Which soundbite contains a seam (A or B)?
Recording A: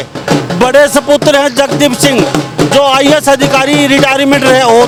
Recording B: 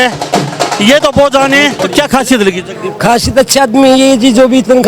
B